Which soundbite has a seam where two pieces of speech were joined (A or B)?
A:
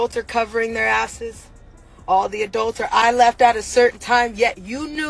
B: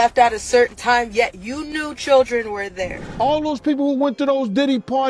B